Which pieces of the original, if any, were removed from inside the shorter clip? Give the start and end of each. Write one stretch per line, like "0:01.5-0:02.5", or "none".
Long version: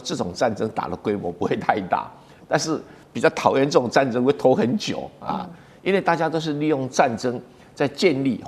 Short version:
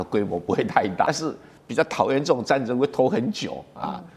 0:02.0-0:02.5